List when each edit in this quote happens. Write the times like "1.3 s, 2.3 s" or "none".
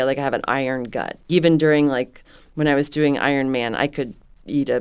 1.3 s